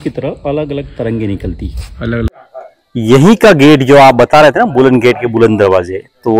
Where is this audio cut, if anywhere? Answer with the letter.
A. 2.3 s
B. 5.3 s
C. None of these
A